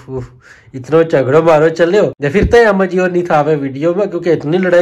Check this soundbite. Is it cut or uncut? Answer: cut